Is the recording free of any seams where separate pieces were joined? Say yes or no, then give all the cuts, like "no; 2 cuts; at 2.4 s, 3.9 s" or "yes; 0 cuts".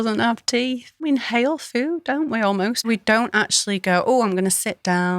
no; 2 cuts; at 1.1 s, 2.9 s